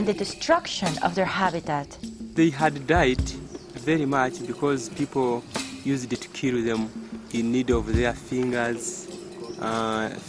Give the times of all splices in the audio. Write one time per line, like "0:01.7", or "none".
0:01.8

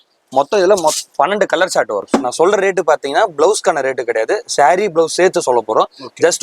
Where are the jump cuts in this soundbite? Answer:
0:02.0

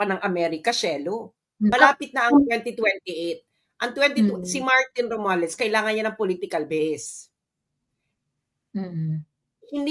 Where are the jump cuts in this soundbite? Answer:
0:01.7

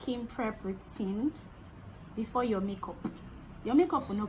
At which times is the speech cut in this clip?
none

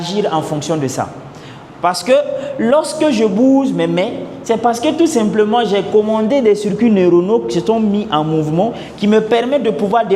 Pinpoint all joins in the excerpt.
none

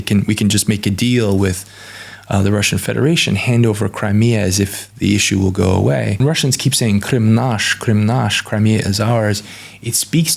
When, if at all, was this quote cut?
0:06.2

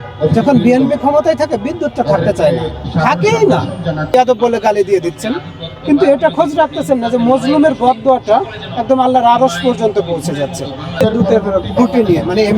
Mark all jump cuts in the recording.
0:04.1
0:11.0

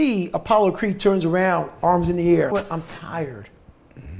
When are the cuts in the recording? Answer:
0:02.5

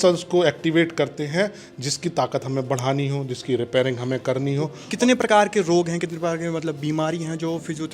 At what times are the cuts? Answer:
0:04.8

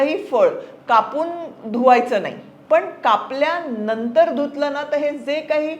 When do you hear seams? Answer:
0:02.5

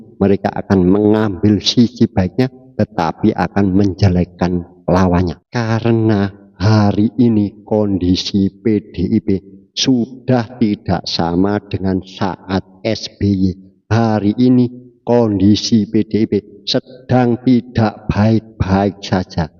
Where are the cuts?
0:05.4

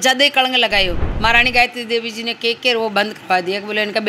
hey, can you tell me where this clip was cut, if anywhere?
0:01.0

